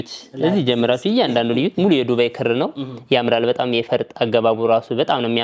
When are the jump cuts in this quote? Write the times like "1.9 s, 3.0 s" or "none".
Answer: none